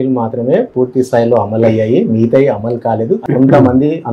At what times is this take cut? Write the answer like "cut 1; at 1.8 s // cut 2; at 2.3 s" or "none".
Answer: cut 1; at 3.2 s